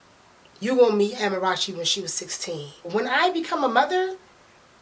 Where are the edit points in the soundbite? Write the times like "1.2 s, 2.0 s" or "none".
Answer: 2.9 s